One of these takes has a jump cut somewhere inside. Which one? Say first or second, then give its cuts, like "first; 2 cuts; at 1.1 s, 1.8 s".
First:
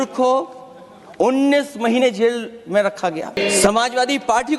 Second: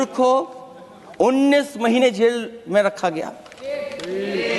first; 1 cut; at 3.4 s